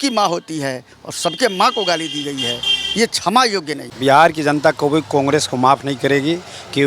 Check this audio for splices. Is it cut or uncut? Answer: cut